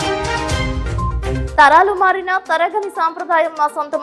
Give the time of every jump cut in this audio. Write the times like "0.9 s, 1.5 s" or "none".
1.4 s